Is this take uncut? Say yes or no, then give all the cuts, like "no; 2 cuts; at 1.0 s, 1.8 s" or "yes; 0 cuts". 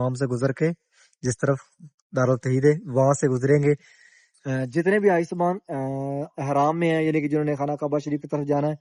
yes; 0 cuts